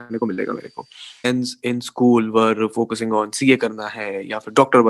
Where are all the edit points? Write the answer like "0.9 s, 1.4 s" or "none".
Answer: 1.3 s